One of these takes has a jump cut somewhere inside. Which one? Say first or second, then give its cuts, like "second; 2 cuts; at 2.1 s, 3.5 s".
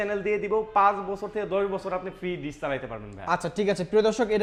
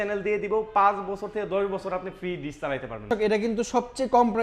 second; 1 cut; at 3.1 s